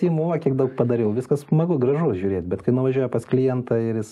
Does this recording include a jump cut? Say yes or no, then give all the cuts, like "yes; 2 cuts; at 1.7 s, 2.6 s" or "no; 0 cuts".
no; 0 cuts